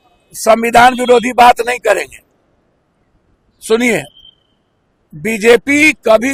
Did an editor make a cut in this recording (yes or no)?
no